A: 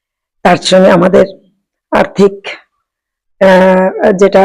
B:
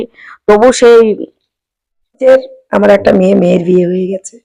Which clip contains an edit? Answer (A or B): B